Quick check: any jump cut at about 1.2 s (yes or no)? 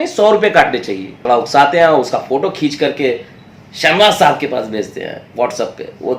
yes